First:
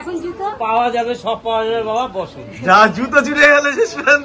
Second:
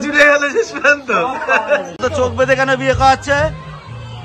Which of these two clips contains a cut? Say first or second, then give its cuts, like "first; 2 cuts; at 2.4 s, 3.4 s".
second; 1 cut; at 2.0 s